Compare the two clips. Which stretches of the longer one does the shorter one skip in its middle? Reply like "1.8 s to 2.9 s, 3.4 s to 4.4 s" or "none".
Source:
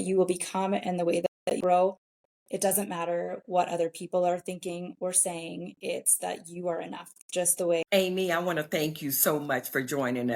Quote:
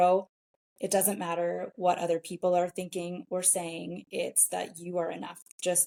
none